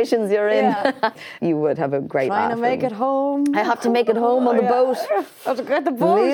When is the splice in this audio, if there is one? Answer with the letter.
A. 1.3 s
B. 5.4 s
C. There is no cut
A